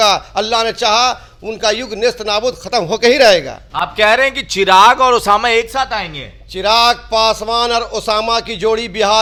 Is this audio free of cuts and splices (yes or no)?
yes